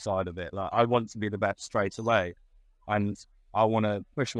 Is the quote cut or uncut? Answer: uncut